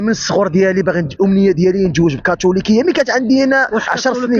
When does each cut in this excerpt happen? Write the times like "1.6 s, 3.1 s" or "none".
none

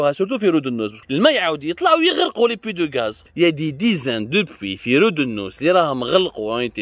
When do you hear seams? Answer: 1.0 s, 3.2 s

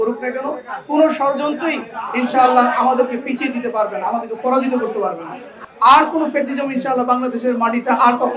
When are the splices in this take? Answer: 5.6 s

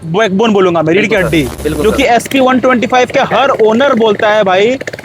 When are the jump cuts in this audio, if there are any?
1.5 s

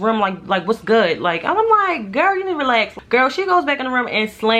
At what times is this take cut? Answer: 3.0 s

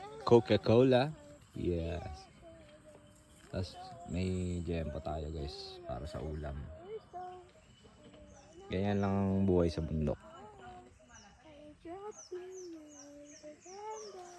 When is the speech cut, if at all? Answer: none

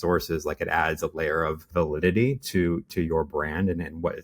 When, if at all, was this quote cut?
none

